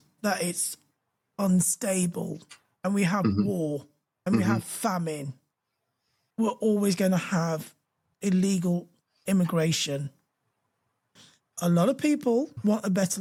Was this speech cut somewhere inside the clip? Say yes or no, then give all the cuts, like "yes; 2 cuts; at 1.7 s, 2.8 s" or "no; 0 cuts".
no; 0 cuts